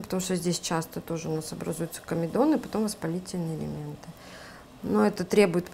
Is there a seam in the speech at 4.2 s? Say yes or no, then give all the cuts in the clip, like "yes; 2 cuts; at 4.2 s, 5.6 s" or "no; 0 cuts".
no; 0 cuts